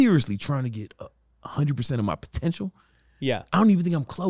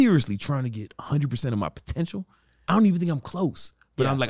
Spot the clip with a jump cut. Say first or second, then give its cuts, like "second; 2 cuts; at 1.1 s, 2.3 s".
second; 2 cuts; at 0.9 s, 2.6 s